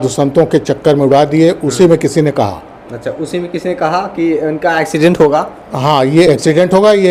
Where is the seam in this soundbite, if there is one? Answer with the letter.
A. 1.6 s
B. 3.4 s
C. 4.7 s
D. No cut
D